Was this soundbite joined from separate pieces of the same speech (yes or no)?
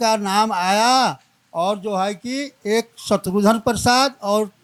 no